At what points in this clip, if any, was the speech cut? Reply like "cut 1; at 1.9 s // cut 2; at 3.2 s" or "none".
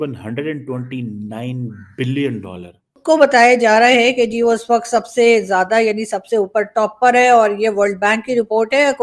cut 1; at 2.9 s

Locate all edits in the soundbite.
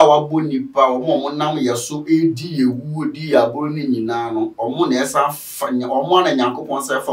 none

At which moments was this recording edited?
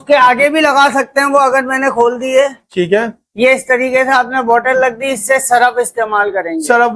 none

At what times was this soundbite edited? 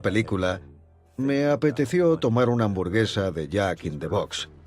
none

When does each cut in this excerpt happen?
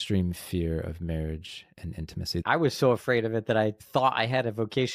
cut 1; at 2.4 s

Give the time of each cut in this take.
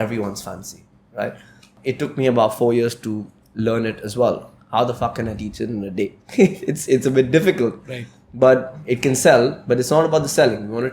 none

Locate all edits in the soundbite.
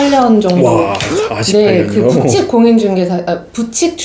none

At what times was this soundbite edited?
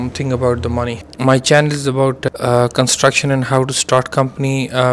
cut 1; at 1.0 s // cut 2; at 2.2 s

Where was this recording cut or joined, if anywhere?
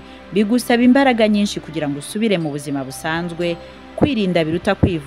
cut 1; at 4.0 s

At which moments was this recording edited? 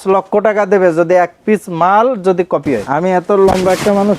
cut 1; at 2.8 s

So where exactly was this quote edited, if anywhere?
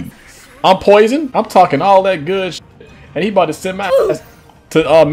cut 1; at 1.3 s

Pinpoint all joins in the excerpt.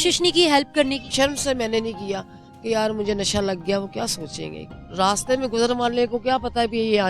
cut 1; at 1.0 s // cut 2; at 4.7 s

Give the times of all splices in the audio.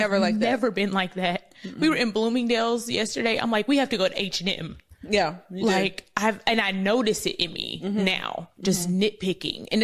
cut 1; at 6.1 s

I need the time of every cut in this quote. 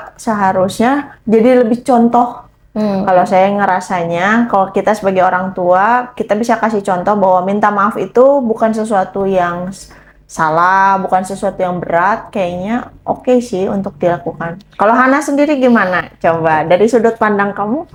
none

